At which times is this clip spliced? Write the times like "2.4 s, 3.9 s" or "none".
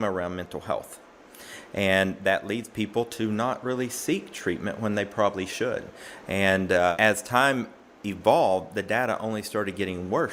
none